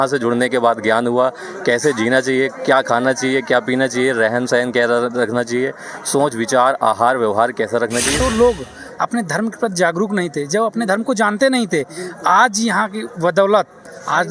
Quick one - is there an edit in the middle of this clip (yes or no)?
yes